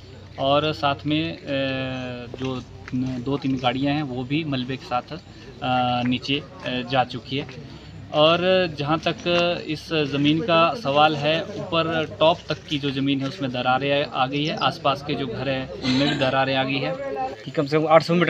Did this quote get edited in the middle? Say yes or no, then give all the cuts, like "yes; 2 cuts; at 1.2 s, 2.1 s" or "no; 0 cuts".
yes; 1 cut; at 17.3 s